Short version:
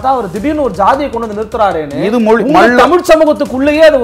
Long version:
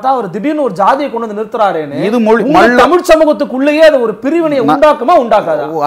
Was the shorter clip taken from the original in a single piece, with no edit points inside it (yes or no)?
yes